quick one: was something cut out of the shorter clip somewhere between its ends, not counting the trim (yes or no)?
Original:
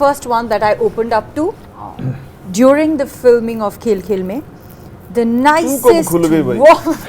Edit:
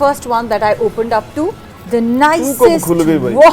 yes